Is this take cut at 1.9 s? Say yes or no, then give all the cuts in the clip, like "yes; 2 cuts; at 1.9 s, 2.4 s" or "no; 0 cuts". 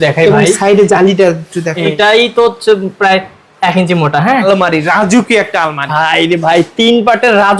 yes; 2 cuts; at 1.9 s, 4.3 s